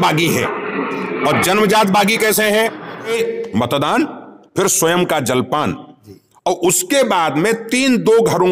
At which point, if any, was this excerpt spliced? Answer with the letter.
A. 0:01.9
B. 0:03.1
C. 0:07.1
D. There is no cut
B